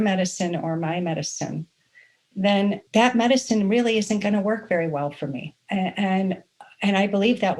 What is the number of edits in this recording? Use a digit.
1